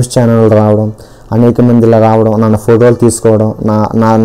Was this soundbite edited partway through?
no; 0 cuts

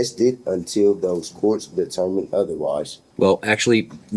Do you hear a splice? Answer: yes; 1 cut; at 3.0 s

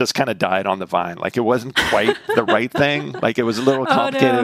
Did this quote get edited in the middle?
no; 0 cuts

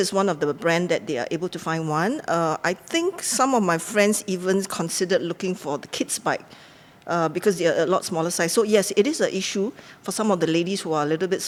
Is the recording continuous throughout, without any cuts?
yes; 0 cuts

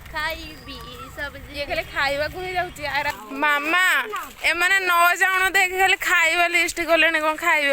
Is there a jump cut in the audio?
yes; 1 cut; at 3.1 s

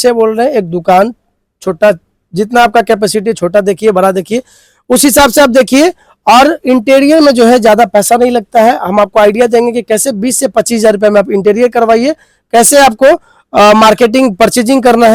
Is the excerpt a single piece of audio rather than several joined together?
yes; 0 cuts

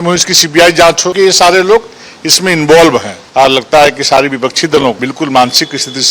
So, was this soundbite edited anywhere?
yes; 3 cuts; at 1.1 s, 3.1 s, 5.1 s

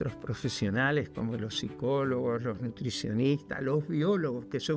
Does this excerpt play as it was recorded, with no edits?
yes; 0 cuts

